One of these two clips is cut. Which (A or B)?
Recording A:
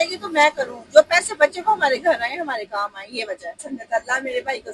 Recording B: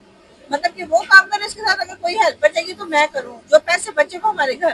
A